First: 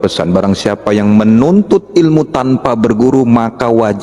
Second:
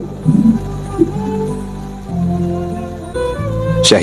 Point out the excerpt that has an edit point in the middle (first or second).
second